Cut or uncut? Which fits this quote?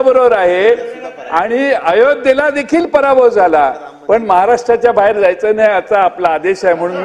uncut